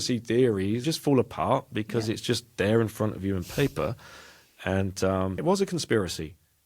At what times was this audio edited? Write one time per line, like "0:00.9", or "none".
0:00.8
0:05.4